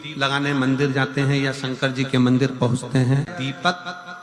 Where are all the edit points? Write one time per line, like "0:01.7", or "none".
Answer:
0:03.3